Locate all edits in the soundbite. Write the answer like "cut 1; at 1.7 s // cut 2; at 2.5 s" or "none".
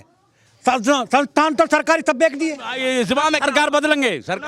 cut 1; at 2.7 s